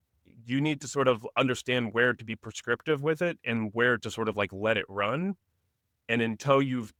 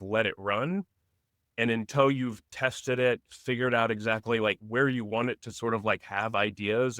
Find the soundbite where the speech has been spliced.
second; 1 cut; at 4.6 s

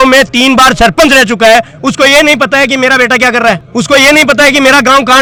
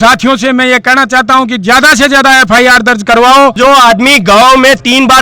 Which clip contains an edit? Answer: second; 1 cut; at 3.6 s

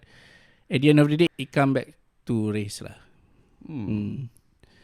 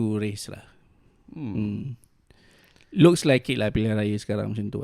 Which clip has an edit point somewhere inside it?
first; 1 cut; at 1.3 s

